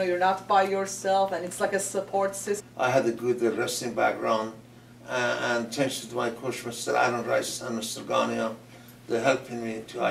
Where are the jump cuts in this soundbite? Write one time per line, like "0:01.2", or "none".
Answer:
none